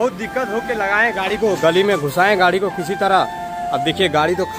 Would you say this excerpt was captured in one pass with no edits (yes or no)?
yes